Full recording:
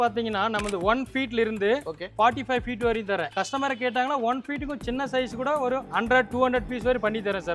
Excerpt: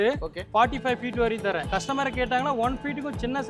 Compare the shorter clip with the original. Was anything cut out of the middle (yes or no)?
no